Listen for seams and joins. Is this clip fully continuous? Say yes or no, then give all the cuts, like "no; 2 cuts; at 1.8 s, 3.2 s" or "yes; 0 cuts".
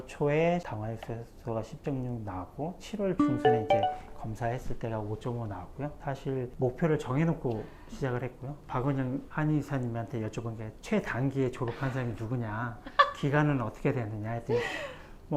yes; 0 cuts